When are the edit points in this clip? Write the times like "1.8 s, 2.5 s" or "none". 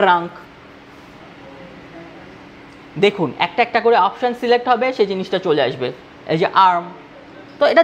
1.2 s